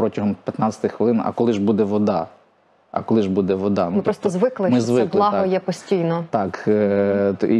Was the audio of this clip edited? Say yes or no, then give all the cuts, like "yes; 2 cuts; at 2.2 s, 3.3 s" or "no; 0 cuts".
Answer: no; 0 cuts